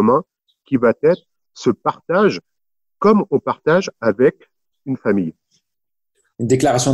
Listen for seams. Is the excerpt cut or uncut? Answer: uncut